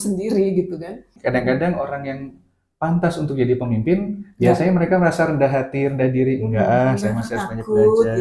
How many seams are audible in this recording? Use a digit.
1